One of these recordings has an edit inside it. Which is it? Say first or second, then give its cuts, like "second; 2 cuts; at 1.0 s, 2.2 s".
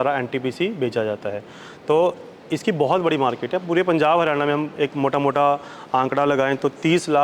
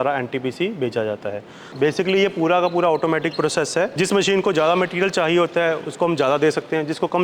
second; 1 cut; at 1.6 s